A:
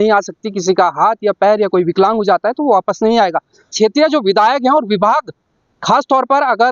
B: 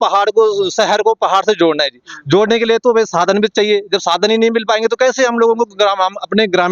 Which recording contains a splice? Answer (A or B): A